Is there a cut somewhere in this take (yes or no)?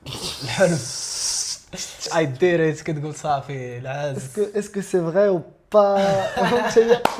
yes